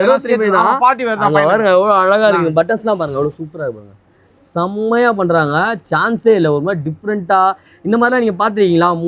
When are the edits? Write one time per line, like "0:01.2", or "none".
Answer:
none